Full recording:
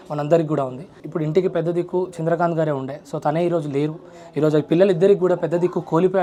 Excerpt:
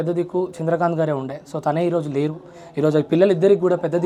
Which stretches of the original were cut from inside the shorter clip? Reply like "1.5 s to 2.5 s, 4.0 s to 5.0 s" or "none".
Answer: none